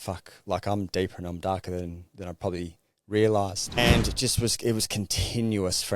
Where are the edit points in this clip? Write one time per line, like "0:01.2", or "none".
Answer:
0:03.8